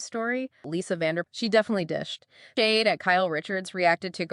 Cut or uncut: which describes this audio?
cut